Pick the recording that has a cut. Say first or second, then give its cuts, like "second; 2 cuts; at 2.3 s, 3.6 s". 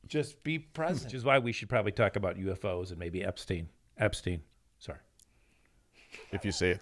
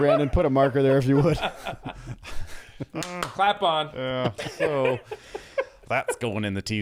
first; 1 cut; at 1.2 s